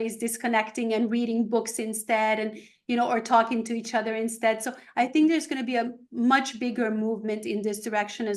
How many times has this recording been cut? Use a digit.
0